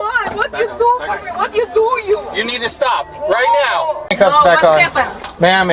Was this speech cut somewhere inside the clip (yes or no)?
yes